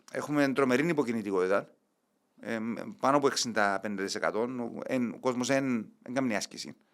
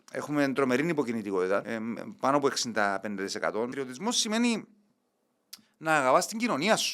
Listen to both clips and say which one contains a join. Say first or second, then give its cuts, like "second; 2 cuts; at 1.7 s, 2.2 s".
second; 2 cuts; at 1.7 s, 3.7 s